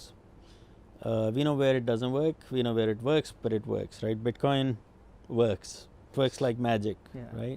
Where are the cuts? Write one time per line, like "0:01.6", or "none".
0:06.1